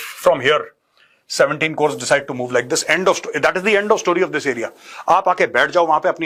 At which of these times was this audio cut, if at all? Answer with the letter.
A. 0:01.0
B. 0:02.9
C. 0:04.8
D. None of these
D